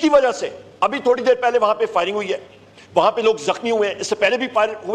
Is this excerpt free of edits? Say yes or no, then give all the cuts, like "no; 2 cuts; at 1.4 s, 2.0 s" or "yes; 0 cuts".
yes; 0 cuts